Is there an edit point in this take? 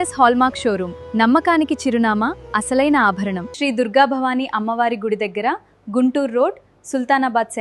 yes; 1 cut; at 3.4 s

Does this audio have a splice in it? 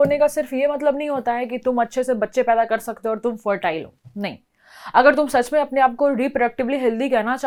no; 0 cuts

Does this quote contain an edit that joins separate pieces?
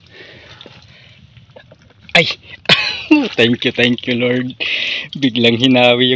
no; 0 cuts

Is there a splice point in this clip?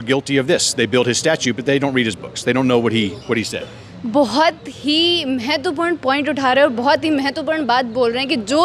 no; 0 cuts

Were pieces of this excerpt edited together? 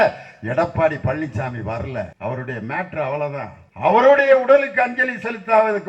yes; 2 cuts; at 2.1 s, 3.6 s

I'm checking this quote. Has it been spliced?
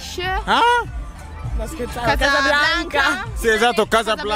no; 0 cuts

